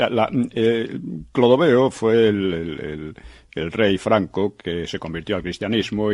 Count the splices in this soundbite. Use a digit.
1